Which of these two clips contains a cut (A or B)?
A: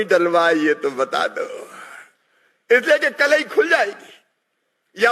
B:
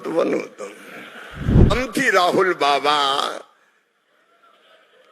B